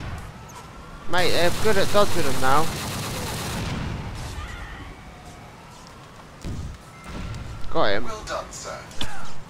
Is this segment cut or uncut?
cut